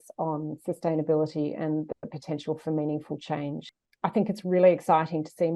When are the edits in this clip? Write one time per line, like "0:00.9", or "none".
0:03.7